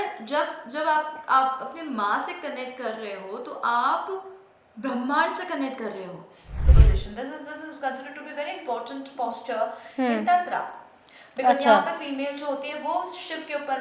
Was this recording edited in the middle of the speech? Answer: yes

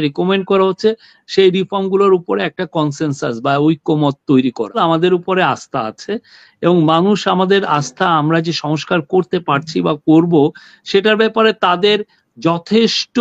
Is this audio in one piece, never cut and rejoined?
no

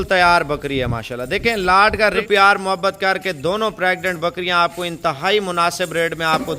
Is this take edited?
yes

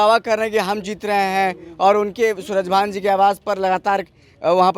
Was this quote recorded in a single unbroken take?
yes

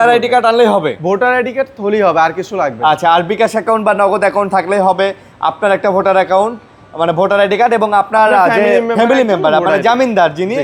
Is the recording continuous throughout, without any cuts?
yes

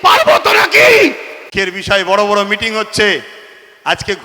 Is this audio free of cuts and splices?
no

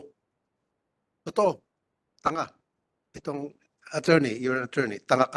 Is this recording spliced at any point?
no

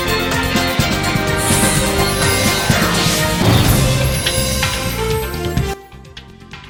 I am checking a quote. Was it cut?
no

